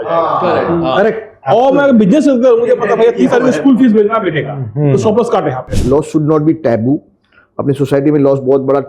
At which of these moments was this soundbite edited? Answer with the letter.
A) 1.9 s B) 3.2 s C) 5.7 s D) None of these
C